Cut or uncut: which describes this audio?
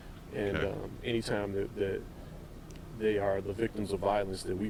uncut